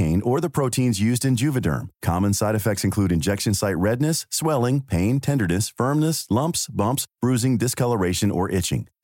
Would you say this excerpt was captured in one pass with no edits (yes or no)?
yes